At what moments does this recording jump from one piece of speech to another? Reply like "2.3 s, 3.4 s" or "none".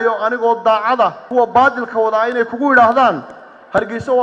1.2 s